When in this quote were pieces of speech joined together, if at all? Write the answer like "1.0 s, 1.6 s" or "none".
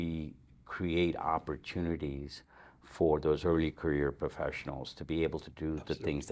none